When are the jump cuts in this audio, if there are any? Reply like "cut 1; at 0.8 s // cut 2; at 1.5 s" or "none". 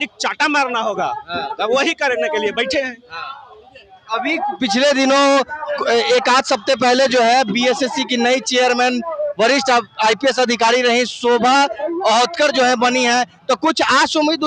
none